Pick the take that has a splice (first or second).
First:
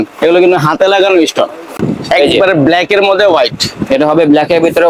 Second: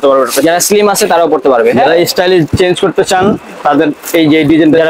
first